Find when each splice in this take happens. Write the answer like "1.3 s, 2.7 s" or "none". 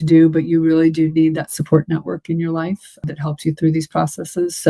3.0 s